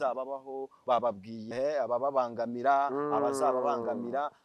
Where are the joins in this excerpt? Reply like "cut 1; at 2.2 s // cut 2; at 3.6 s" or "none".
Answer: cut 1; at 1.5 s